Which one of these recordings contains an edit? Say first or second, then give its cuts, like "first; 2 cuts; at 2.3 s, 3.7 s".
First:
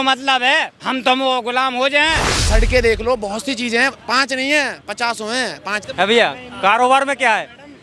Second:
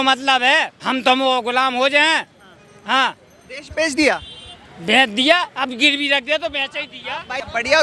first; 2 cuts; at 2.3 s, 5.8 s